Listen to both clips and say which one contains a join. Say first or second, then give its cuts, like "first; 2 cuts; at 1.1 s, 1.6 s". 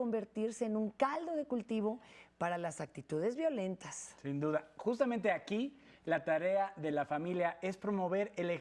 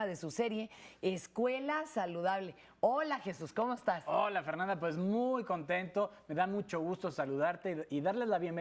second; 1 cut; at 5.9 s